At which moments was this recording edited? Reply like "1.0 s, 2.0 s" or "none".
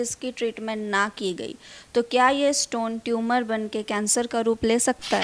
none